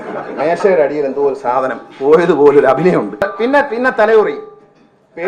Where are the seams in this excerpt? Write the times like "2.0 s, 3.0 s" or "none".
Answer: 3.2 s